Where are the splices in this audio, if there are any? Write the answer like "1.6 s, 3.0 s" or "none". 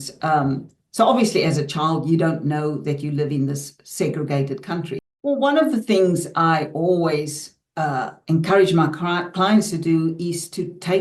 5.0 s